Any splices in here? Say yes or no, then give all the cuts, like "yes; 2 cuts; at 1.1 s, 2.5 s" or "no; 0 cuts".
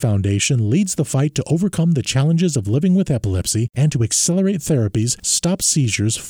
no; 0 cuts